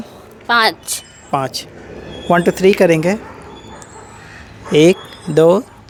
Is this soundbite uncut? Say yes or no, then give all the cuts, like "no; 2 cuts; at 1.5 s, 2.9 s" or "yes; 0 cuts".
yes; 0 cuts